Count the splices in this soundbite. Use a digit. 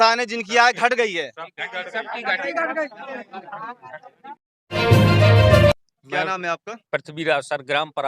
2